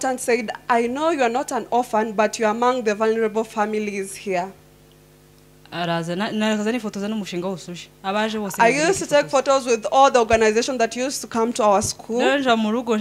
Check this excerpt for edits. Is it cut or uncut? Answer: uncut